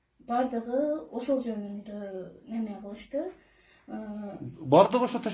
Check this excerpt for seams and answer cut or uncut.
uncut